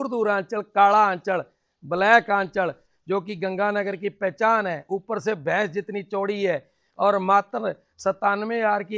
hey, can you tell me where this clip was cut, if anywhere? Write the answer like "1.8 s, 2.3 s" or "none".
none

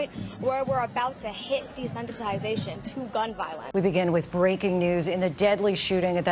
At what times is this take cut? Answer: 3.5 s

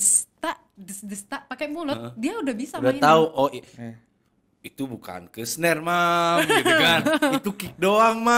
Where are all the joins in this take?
none

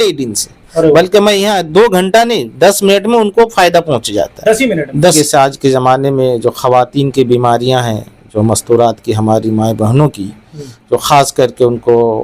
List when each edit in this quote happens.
5.1 s

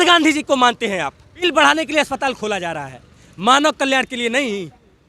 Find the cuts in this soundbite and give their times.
1.4 s

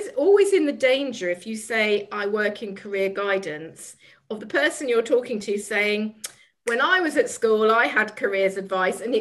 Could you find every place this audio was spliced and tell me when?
none

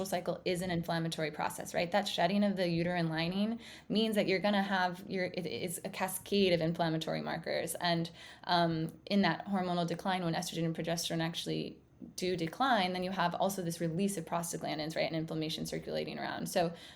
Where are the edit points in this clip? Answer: none

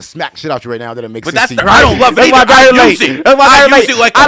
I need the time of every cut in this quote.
1.6 s

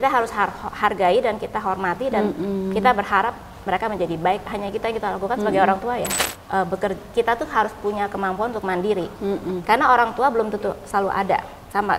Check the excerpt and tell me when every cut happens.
6.2 s

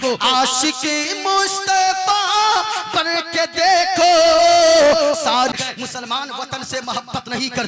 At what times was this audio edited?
5.6 s

